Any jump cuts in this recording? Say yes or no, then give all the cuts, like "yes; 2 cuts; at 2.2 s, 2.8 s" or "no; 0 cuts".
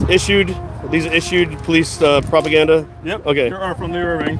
no; 0 cuts